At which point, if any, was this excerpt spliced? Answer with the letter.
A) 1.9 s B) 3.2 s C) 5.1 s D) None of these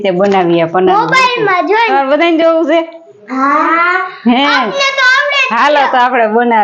A